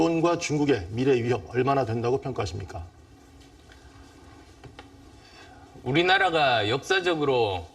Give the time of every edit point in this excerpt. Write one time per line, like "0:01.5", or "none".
none